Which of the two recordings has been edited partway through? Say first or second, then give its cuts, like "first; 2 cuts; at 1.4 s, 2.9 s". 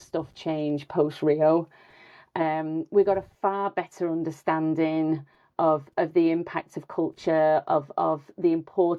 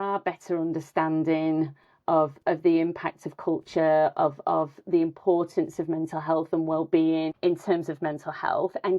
second; 1 cut; at 7.3 s